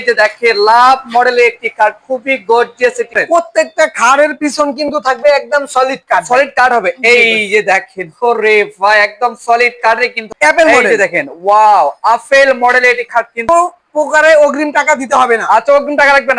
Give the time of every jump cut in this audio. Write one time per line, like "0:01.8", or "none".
0:03.2
0:10.3
0:13.5